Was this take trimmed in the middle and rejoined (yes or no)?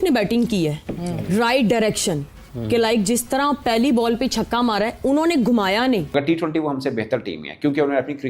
yes